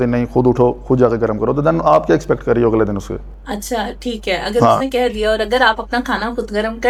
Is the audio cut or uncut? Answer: uncut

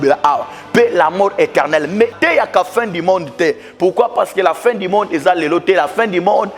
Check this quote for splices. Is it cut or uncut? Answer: cut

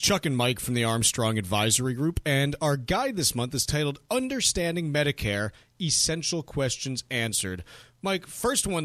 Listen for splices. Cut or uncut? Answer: uncut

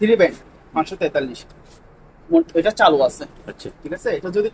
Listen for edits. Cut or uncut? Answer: uncut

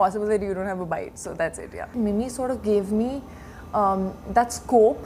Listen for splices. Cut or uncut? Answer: cut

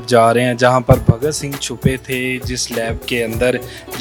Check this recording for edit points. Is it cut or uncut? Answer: uncut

